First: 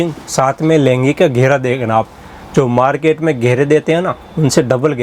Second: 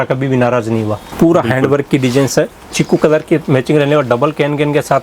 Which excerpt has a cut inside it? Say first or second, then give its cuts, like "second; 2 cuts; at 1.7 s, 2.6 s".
second; 1 cut; at 1.0 s